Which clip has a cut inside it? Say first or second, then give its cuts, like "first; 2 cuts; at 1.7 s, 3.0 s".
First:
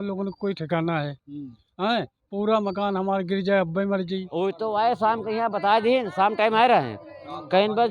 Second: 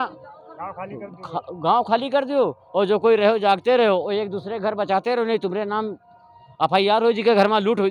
first; 1 cut; at 4.3 s